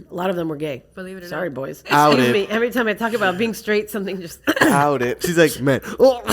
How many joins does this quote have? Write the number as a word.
two